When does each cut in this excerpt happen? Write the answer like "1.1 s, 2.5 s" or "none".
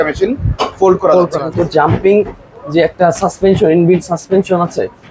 1.5 s